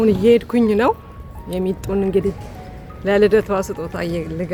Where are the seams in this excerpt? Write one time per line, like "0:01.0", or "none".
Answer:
none